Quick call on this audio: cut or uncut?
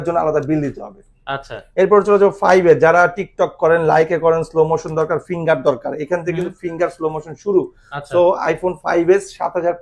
uncut